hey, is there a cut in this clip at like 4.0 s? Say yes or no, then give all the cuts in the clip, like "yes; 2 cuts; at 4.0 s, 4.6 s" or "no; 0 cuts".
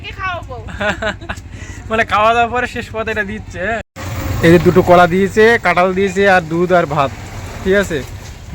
yes; 1 cut; at 4.0 s